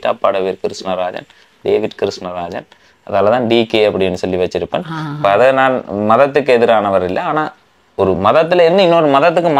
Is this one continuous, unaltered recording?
yes; 0 cuts

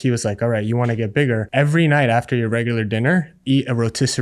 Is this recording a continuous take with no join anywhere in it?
no; 1 cut; at 1.5 s

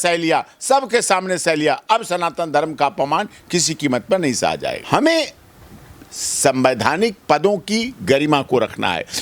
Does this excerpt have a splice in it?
yes; 1 cut; at 4.8 s

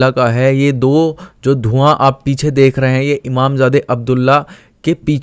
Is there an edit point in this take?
no; 0 cuts

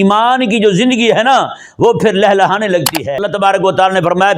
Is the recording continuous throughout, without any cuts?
no; 1 cut; at 3.1 s

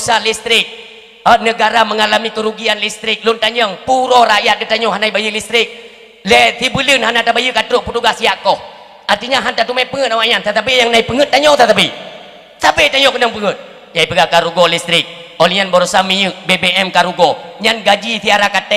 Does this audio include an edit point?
no; 0 cuts

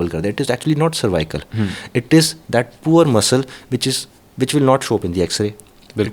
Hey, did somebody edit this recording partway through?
no; 0 cuts

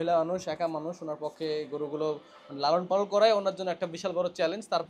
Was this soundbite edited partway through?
no; 0 cuts

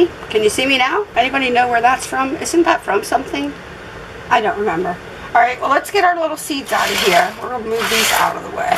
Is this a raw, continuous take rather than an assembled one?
yes; 0 cuts

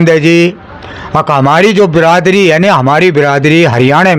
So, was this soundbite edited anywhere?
no; 0 cuts

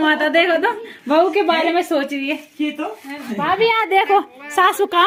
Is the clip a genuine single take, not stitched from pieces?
yes; 0 cuts

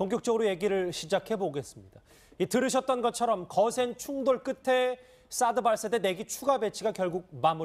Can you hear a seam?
yes; 1 cut; at 2.9 s

